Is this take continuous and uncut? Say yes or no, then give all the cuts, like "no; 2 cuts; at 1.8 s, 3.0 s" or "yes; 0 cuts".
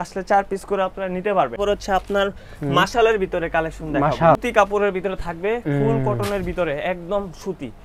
no; 2 cuts; at 1.6 s, 4.4 s